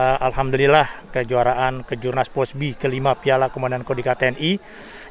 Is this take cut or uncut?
uncut